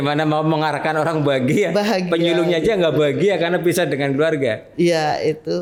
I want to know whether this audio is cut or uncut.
uncut